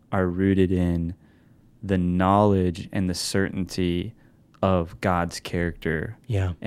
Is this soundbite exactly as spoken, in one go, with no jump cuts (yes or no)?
yes